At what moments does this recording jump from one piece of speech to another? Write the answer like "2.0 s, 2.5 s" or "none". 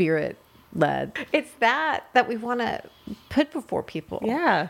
1.1 s